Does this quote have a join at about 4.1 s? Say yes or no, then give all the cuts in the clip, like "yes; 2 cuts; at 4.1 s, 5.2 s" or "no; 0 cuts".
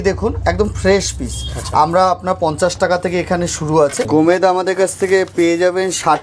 yes; 1 cut; at 4.1 s